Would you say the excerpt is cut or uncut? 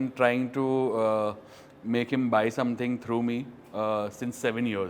uncut